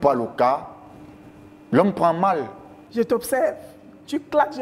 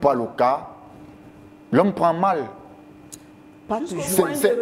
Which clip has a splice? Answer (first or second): first